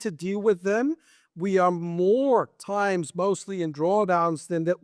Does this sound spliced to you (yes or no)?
no